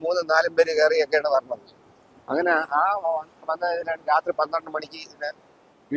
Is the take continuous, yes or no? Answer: yes